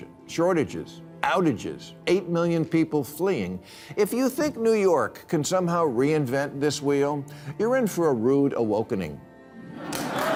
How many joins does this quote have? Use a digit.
0